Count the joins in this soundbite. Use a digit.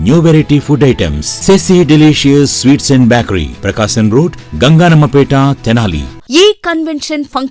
1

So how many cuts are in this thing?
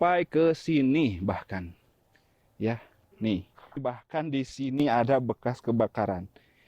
1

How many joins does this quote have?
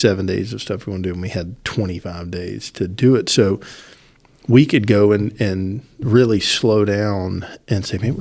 0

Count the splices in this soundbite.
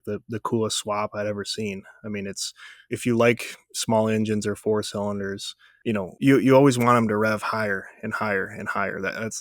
0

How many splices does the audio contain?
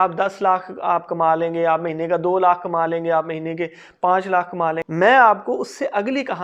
1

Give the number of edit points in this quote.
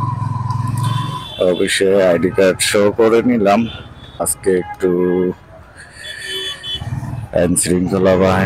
1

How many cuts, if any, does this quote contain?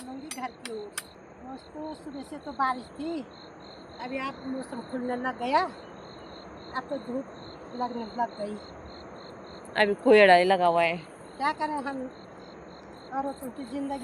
1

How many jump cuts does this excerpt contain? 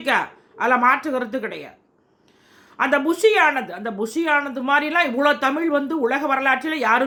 0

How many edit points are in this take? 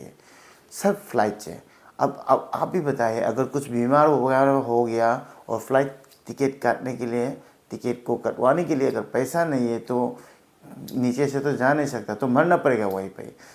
0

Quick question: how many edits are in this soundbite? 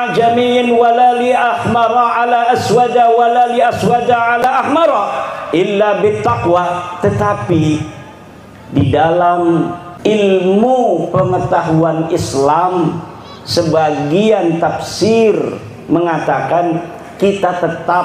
2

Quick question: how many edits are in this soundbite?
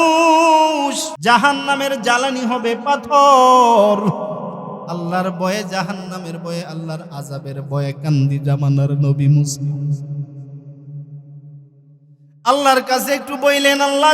1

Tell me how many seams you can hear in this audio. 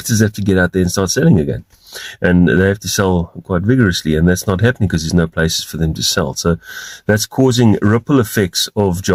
0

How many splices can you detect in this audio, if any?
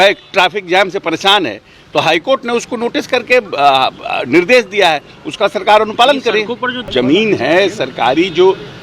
1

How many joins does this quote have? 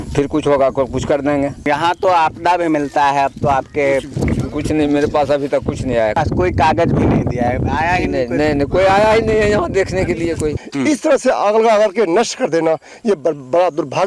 3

